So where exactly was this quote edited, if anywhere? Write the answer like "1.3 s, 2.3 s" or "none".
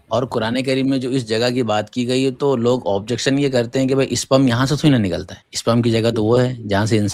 none